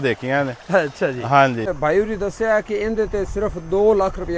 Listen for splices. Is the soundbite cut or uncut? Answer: cut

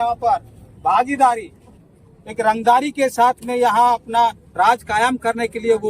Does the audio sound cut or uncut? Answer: cut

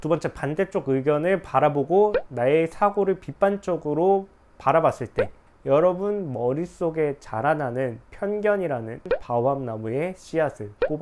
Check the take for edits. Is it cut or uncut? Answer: cut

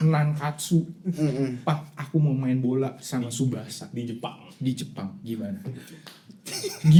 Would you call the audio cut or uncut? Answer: uncut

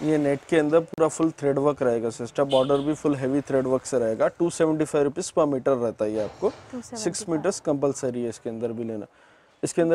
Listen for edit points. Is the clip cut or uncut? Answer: uncut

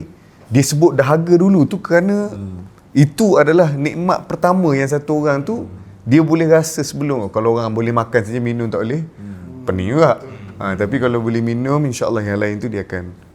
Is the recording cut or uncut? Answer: uncut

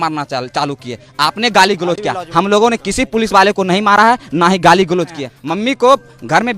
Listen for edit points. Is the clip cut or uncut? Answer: cut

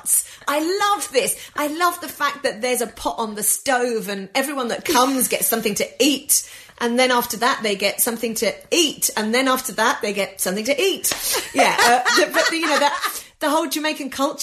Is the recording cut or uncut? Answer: uncut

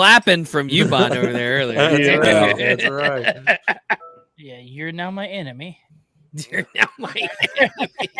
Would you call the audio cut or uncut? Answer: cut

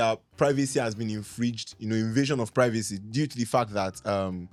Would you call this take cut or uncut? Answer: uncut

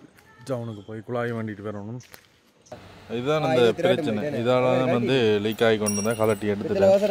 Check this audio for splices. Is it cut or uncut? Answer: cut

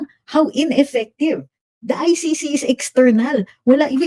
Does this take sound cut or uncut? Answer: uncut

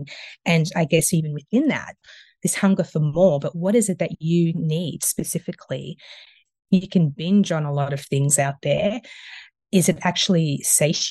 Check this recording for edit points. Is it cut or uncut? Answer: cut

